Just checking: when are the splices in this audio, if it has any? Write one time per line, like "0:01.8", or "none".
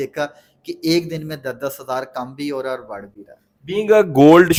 none